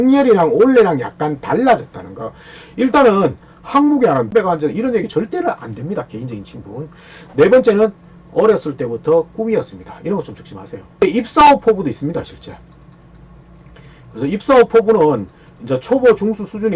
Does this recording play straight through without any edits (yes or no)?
no